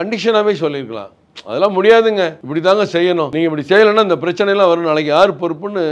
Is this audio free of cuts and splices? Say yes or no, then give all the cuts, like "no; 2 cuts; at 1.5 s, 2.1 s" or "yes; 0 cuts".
no; 2 cuts; at 2.4 s, 3.3 s